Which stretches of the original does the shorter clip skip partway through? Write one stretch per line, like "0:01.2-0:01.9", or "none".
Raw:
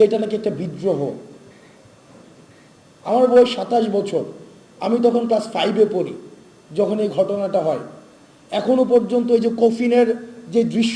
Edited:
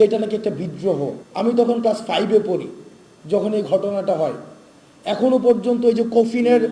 0:01.2-0:04.7